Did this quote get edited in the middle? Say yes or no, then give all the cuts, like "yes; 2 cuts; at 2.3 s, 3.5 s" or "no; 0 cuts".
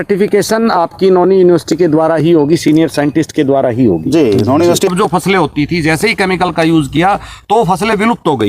yes; 1 cut; at 4.9 s